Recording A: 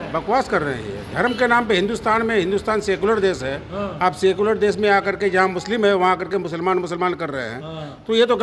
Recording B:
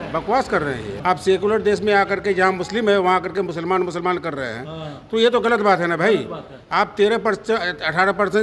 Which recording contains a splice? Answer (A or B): B